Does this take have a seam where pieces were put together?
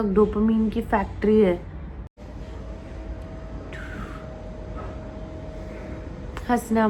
no; 0 cuts

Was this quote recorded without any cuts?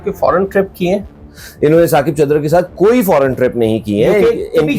yes; 0 cuts

